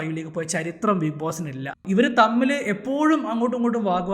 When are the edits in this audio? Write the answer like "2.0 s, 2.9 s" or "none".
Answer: 1.8 s